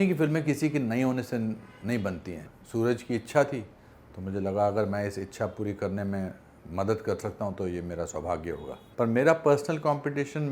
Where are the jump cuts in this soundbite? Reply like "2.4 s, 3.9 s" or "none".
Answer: 8.8 s